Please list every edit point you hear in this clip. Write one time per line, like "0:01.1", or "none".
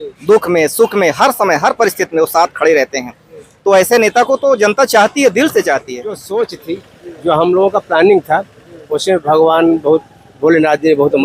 0:06.2